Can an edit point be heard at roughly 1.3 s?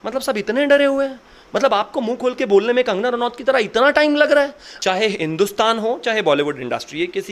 no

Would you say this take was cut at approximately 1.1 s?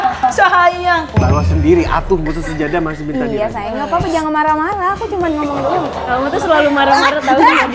yes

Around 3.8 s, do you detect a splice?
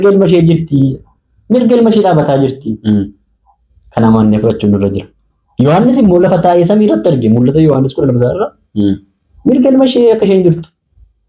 no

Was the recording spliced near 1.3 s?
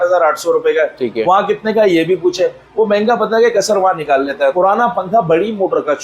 no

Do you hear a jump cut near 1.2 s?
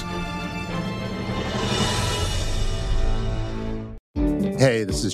no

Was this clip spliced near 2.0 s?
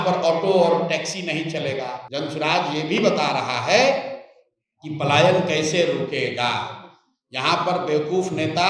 yes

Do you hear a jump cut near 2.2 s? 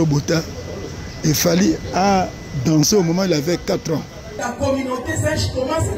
no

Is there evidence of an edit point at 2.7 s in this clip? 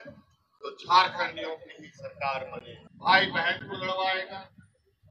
yes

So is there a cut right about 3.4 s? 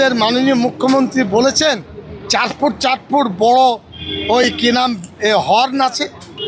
no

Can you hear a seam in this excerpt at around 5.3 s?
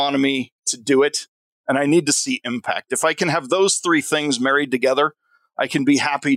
no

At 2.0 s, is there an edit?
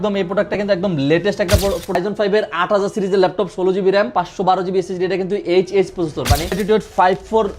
yes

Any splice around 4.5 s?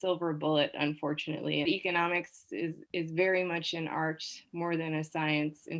no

